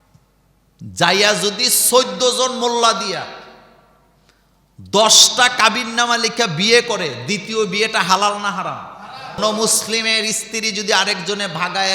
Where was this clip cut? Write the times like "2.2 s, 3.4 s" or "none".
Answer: 9.4 s